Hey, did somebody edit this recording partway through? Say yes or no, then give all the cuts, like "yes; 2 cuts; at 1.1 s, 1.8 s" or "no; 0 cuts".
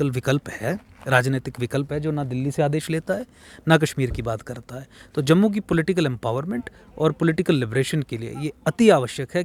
no; 0 cuts